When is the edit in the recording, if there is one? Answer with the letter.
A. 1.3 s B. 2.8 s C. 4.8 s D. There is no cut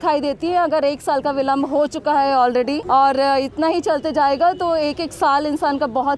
B